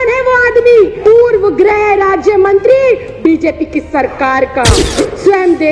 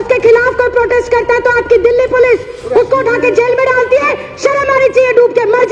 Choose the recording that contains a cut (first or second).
first